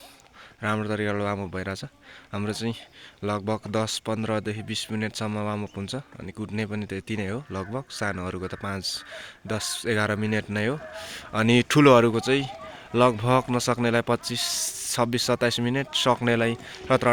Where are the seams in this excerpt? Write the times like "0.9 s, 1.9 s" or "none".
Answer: none